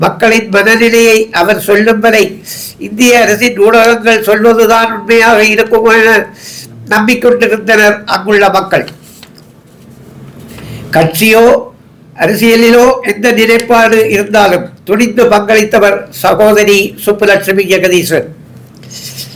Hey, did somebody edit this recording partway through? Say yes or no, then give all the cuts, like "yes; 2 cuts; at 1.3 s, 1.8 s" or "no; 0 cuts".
no; 0 cuts